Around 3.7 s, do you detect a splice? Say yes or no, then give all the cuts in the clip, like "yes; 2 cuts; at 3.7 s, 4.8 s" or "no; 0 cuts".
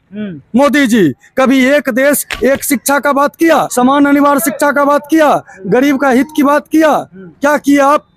yes; 1 cut; at 3.7 s